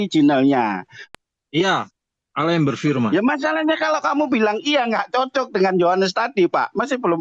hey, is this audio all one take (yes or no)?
no